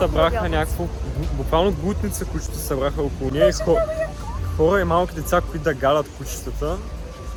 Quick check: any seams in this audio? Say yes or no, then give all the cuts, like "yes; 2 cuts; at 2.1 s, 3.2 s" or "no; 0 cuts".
no; 0 cuts